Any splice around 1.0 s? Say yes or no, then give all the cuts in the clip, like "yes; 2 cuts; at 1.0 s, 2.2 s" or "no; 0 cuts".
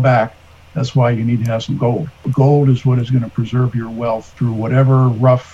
no; 2 cuts; at 2.3 s, 4.3 s